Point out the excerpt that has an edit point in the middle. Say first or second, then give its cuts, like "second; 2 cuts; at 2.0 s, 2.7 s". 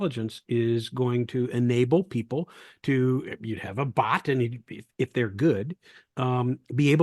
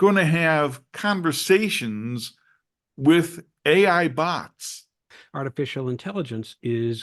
second; 1 cut; at 5.2 s